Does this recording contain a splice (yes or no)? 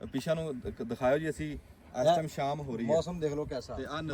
no